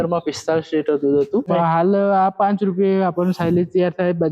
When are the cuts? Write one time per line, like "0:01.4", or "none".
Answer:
0:01.5

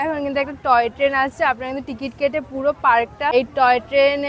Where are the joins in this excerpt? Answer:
0:03.3

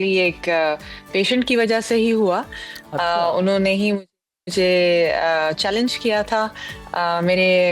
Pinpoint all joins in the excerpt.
none

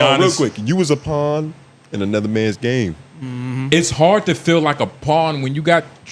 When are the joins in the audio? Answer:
none

